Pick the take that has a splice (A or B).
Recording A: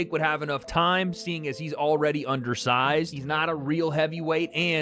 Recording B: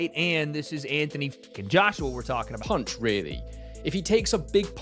B